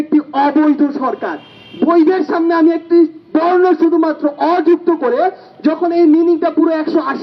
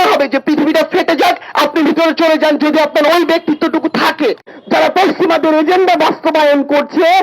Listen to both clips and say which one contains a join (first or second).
second